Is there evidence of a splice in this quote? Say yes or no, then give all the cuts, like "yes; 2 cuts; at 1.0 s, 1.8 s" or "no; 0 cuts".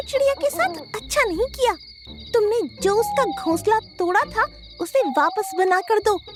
no; 0 cuts